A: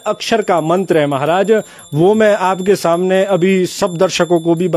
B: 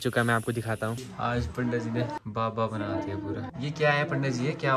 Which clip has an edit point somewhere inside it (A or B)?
B